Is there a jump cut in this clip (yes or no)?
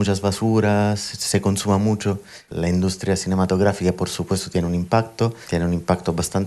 yes